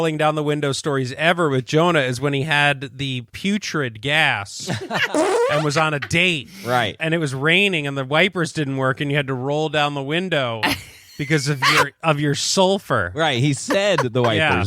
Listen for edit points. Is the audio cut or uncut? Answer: cut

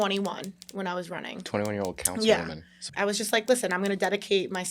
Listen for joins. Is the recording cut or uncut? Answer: cut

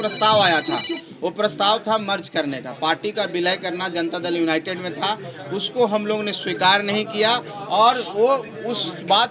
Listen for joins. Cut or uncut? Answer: uncut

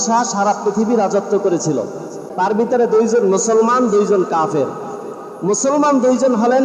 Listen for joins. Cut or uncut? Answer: cut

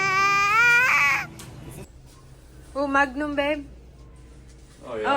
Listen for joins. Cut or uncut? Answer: cut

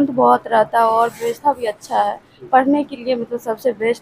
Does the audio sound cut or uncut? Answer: uncut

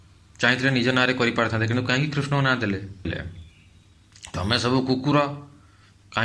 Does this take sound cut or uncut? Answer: cut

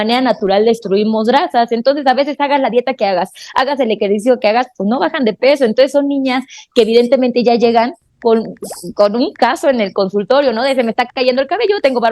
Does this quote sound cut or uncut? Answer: uncut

